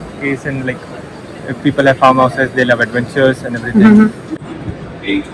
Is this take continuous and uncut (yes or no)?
no